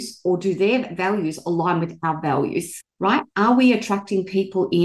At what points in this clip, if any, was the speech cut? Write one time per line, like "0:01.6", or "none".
0:02.8